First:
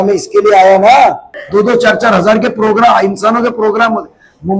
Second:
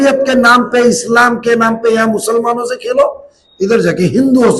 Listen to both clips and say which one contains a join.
first; 1 cut; at 1.3 s

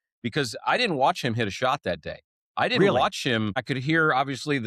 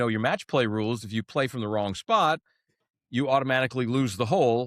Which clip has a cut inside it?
first; 1 cut; at 3.6 s

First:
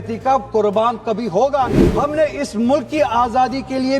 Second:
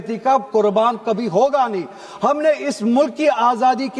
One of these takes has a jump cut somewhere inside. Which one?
first; 1 cut; at 1.8 s

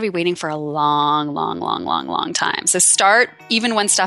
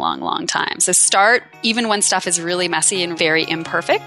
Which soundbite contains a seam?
second; 1 cut; at 3.1 s

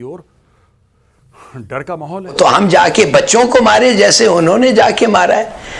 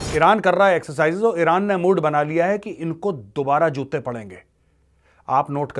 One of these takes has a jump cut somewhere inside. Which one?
first; 1 cut; at 2.3 s

